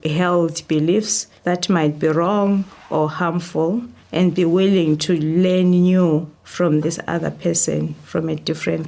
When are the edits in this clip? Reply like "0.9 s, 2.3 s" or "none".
none